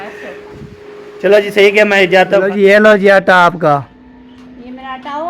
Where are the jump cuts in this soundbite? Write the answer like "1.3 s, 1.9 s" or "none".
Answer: 2.4 s